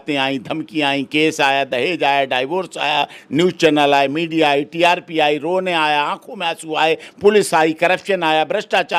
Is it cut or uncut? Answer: uncut